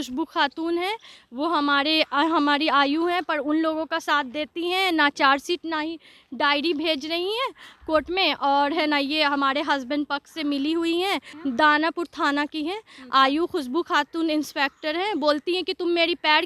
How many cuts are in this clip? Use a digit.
1